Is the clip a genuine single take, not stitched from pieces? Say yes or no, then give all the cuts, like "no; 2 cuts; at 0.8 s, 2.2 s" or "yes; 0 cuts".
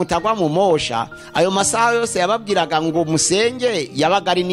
yes; 0 cuts